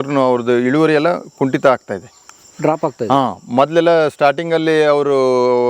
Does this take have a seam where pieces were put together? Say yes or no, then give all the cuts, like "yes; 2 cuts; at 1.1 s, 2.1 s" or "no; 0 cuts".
no; 0 cuts